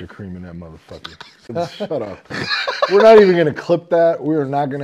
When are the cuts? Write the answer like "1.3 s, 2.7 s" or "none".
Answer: 1.5 s